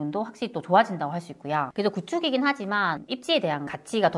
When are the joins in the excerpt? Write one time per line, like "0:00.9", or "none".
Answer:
0:01.7
0:03.2